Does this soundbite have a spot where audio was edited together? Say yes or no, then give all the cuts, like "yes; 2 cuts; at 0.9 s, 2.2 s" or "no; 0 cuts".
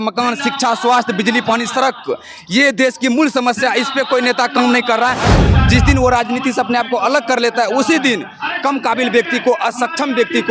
yes; 1 cut; at 5.4 s